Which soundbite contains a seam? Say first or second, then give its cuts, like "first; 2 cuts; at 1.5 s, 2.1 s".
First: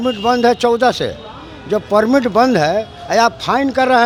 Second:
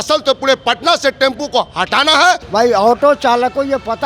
second; 1 cut; at 2.4 s